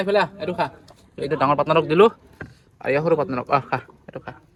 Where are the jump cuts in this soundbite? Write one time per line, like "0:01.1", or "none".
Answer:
none